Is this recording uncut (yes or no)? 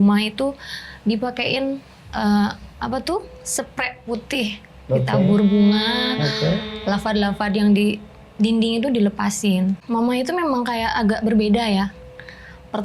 no